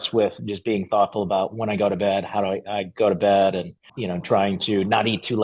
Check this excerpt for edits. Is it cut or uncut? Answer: cut